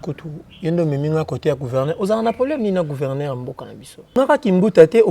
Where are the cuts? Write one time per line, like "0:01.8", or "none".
0:04.2